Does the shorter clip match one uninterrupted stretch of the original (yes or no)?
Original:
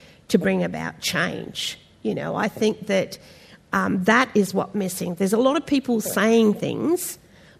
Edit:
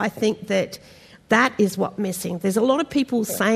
no